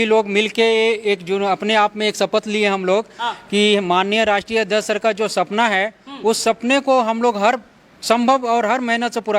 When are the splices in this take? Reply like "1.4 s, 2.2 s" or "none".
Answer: none